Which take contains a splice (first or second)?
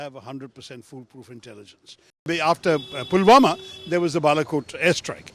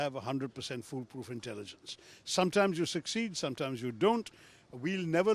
first